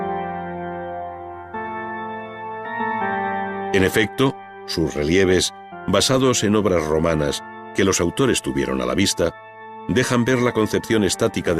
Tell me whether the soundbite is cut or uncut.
uncut